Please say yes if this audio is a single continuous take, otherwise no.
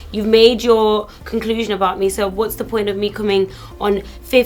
yes